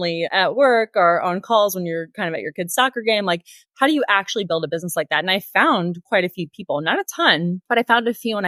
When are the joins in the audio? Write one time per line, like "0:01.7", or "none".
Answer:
none